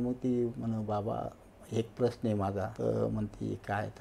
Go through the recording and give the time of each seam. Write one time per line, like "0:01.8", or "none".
0:02.7